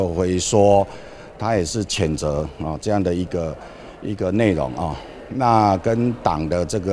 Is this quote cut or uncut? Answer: uncut